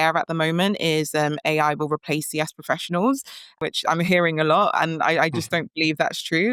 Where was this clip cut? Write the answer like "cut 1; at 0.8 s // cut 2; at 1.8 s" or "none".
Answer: none